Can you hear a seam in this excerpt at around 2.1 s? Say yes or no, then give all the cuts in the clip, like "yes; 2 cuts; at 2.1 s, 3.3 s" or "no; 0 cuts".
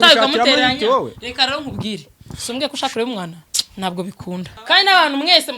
no; 1 cut; at 4.5 s